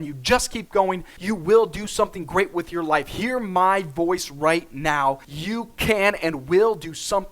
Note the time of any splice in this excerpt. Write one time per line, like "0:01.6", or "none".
0:01.1
0:05.3